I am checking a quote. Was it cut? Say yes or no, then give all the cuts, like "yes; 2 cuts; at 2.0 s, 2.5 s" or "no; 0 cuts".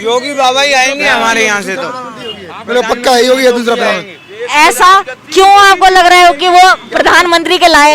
no; 0 cuts